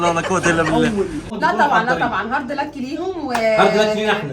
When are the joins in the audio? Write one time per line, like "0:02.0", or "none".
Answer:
0:01.3